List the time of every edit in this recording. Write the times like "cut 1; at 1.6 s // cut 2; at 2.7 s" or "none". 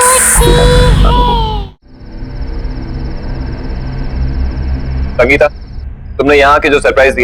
cut 1; at 1.6 s